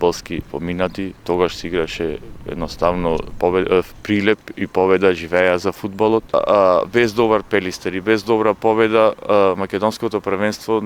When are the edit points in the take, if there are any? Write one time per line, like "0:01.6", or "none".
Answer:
0:06.3